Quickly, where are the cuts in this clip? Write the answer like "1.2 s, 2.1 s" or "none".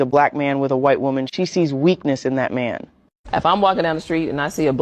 none